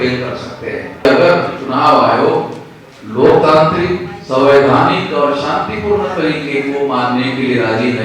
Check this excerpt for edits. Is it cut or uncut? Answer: cut